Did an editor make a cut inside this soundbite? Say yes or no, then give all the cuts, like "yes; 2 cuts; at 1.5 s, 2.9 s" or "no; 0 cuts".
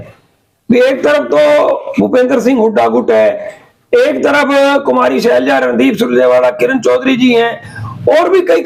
no; 0 cuts